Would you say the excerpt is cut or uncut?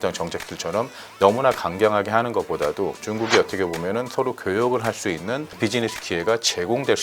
cut